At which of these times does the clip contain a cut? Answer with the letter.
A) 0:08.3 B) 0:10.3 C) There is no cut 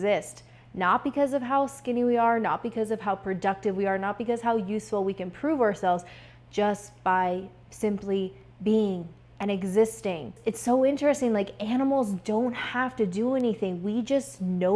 B